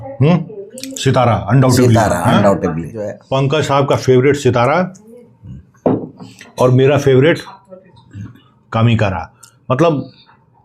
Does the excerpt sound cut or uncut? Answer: cut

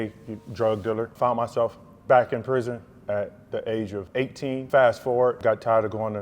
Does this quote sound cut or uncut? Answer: cut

